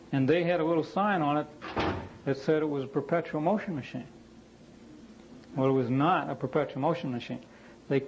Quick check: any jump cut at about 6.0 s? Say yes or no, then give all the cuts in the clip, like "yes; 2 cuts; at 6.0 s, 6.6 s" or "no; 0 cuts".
yes; 1 cut; at 6.0 s